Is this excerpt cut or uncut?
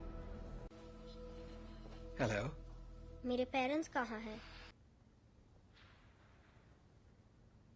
cut